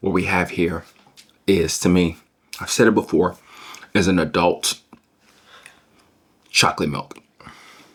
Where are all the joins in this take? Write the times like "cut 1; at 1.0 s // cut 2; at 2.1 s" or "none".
none